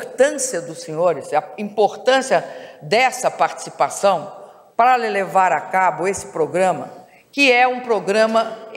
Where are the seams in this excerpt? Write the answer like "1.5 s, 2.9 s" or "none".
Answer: 5.2 s